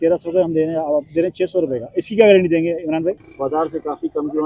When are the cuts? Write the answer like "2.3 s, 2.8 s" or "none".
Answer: 3.3 s